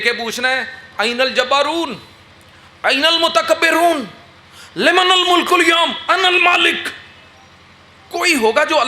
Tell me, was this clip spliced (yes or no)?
no